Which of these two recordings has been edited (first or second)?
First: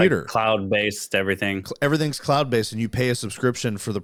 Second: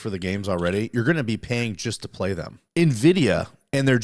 second